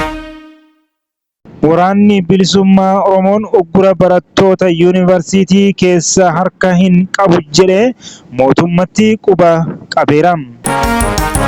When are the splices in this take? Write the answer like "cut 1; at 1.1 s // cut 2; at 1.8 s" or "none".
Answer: cut 1; at 10.6 s

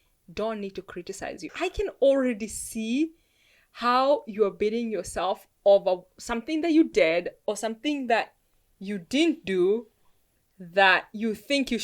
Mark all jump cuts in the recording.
cut 1; at 1.5 s

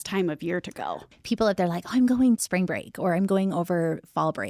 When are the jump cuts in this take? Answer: cut 1; at 1.1 s // cut 2; at 2.4 s

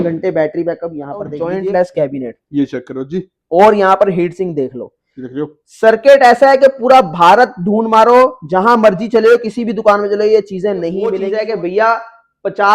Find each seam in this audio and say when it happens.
cut 1; at 1.4 s // cut 2; at 11.2 s

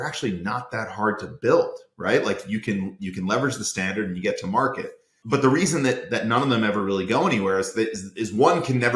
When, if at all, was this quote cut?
none

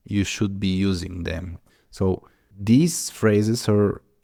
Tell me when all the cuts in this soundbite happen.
none

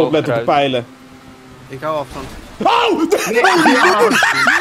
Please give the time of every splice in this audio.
none

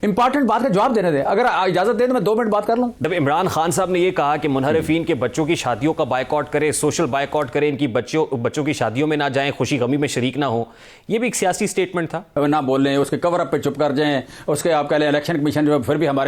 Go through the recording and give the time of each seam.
cut 1; at 3.0 s // cut 2; at 12.3 s

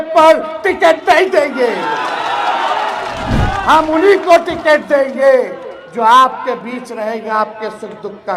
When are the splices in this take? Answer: none

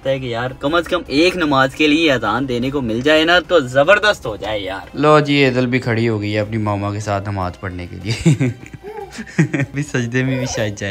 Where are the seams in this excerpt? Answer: cut 1; at 4.8 s // cut 2; at 9.8 s

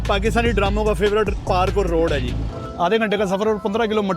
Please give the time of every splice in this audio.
cut 1; at 2.6 s

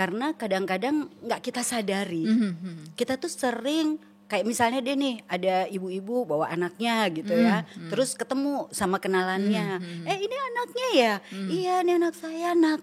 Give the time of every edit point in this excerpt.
none

